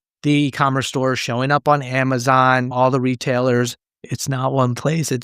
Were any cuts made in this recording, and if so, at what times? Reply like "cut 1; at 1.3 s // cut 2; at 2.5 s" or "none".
cut 1; at 4.1 s